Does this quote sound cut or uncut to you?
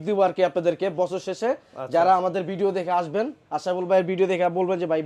uncut